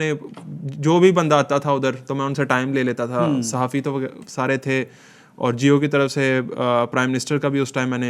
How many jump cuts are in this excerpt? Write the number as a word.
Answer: zero